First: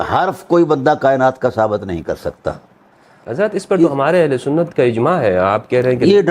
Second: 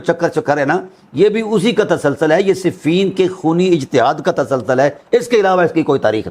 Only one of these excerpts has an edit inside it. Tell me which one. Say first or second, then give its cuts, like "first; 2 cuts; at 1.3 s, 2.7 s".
first; 1 cut; at 3.2 s